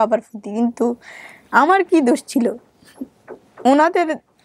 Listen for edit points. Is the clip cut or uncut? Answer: uncut